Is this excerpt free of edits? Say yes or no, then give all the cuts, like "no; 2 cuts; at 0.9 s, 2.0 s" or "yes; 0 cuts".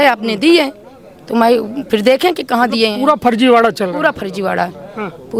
yes; 0 cuts